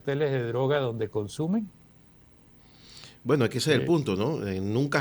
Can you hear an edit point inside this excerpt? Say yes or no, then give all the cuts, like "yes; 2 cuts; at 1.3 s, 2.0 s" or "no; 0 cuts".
no; 0 cuts